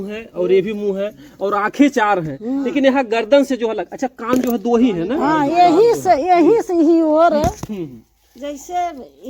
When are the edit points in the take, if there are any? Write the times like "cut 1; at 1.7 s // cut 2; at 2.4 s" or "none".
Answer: none